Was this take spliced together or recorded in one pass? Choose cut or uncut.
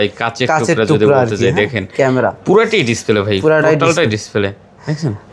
uncut